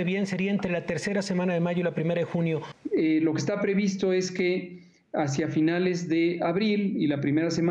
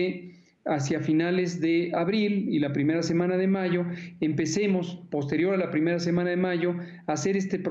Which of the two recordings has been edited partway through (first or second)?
first